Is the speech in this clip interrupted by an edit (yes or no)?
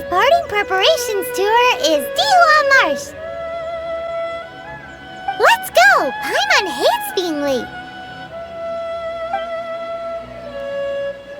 no